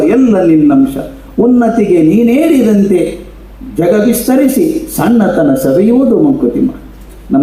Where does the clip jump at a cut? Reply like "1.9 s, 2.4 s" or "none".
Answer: none